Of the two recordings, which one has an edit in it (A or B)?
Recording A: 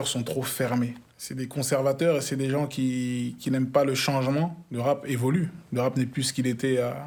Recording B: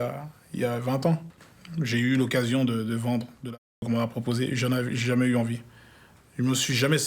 B